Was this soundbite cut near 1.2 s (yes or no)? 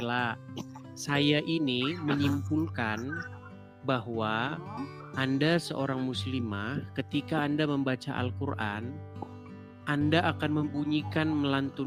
no